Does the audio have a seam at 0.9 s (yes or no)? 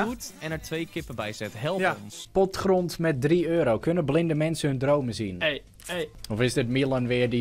no